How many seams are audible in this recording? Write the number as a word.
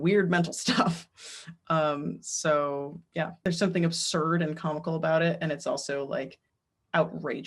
zero